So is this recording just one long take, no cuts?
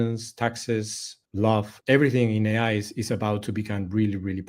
no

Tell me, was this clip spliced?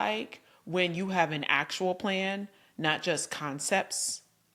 no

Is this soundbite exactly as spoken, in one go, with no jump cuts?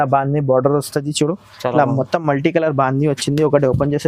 yes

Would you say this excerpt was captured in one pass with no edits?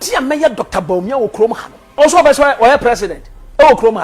no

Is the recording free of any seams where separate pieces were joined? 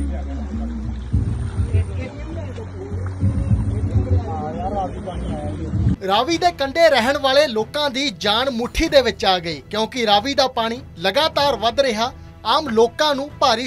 no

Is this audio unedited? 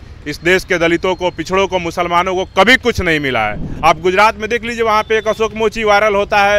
no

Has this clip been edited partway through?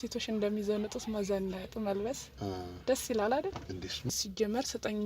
yes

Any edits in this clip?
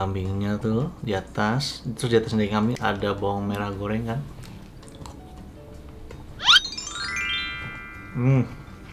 no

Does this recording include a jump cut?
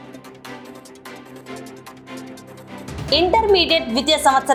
no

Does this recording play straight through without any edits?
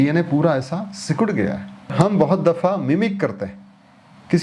no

